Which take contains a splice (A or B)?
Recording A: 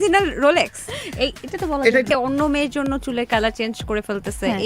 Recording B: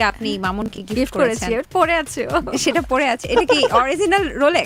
A